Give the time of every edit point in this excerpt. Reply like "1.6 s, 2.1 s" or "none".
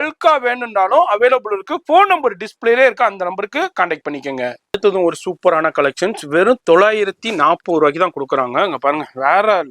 none